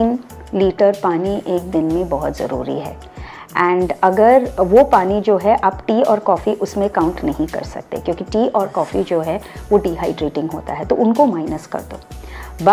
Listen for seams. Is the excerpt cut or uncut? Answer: uncut